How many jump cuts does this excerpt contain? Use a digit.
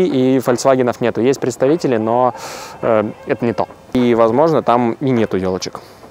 1